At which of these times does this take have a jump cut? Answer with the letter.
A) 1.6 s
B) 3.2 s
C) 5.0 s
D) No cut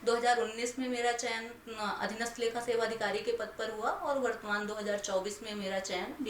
D